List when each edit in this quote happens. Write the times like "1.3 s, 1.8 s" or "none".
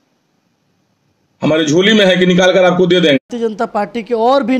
3.2 s